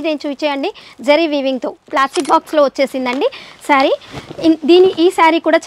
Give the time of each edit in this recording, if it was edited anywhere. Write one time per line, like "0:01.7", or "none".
0:01.8